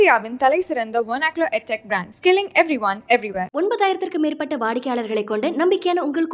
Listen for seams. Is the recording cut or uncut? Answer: uncut